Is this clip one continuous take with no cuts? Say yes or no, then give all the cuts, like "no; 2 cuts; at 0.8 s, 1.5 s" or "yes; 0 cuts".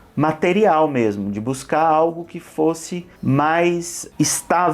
yes; 0 cuts